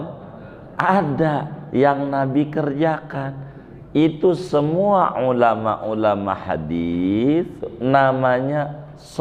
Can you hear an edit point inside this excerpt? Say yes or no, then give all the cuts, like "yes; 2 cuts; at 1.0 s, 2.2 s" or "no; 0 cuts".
no; 0 cuts